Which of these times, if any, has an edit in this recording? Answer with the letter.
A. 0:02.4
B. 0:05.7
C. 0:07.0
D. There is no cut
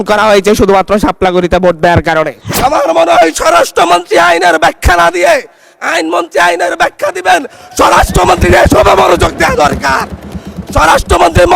A